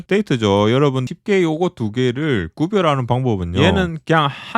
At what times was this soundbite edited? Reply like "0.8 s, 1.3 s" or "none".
1.0 s, 3.5 s